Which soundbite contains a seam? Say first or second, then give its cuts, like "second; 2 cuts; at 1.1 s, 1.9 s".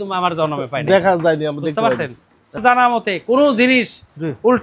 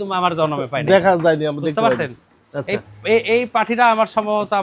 first; 1 cut; at 2.6 s